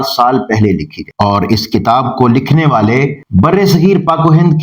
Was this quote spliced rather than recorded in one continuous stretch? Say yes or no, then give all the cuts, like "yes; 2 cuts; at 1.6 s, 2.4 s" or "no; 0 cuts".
no; 0 cuts